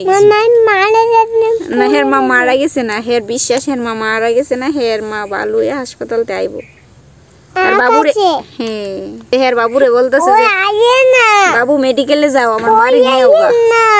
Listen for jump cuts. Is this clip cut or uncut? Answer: cut